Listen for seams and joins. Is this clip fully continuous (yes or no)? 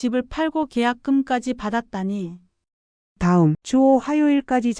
no